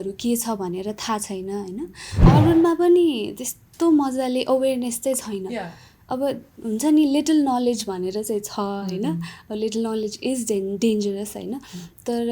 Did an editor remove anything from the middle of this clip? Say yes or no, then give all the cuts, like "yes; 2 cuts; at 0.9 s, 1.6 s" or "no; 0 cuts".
yes; 1 cut; at 2.2 s